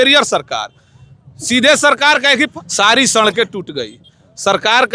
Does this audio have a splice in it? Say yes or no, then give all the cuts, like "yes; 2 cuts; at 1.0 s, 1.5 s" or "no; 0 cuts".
yes; 1 cut; at 2.5 s